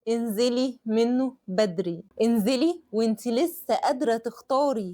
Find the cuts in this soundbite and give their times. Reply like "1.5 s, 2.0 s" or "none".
2.0 s